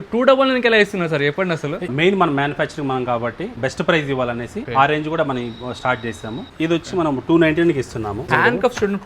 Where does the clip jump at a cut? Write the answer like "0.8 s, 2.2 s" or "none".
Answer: 3.6 s, 4.6 s, 6.4 s, 8.3 s